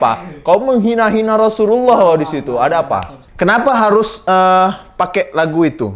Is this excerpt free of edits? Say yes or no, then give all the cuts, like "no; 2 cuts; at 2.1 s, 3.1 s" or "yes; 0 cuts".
no; 1 cut; at 3.2 s